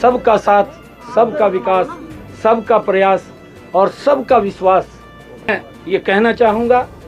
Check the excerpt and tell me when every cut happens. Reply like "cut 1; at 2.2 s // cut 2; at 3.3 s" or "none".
cut 1; at 5.5 s

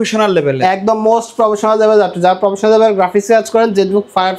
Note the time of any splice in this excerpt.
none

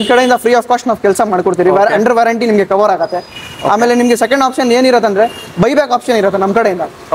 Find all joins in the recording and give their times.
none

